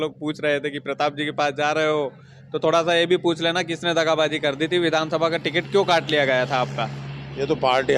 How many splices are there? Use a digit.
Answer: 0